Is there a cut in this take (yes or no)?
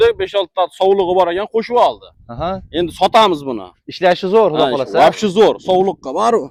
no